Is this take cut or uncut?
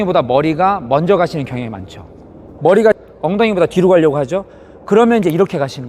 cut